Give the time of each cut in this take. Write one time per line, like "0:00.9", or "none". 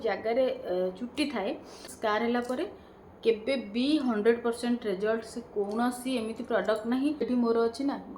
0:01.9
0:07.3